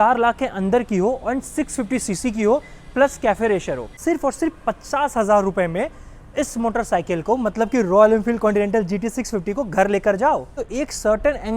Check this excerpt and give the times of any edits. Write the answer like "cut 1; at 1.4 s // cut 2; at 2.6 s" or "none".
cut 1; at 3.9 s // cut 2; at 10.6 s